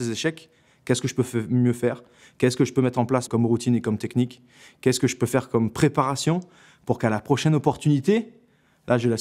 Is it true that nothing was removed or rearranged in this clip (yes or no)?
no